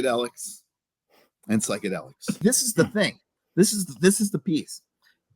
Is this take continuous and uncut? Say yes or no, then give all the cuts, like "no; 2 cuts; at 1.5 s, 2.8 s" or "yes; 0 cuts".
no; 1 cut; at 2.4 s